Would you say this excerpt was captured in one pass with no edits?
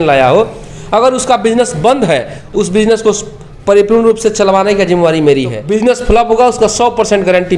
no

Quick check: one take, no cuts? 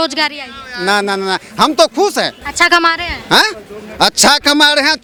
yes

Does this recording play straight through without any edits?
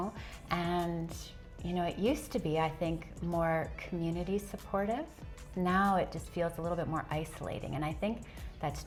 yes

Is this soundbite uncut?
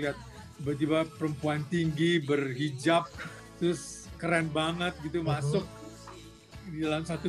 yes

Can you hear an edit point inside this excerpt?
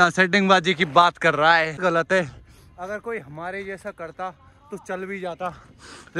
yes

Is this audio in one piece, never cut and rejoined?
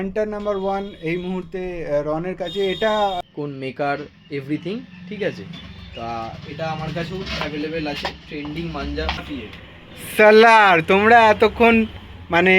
no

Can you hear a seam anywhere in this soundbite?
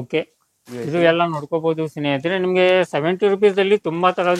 no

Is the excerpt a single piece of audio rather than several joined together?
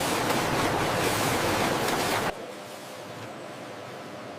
yes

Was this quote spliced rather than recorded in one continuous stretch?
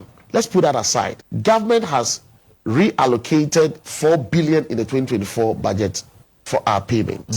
yes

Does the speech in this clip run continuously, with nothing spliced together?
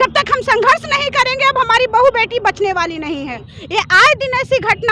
no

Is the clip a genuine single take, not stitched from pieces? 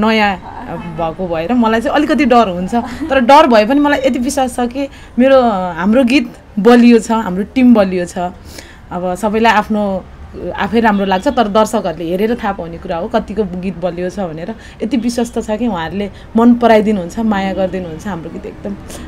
yes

